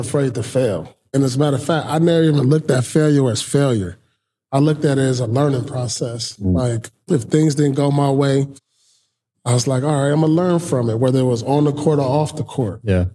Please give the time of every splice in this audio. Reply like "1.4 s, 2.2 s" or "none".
1.0 s